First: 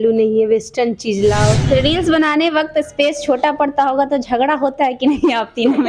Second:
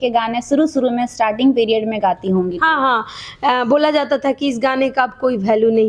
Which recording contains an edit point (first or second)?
first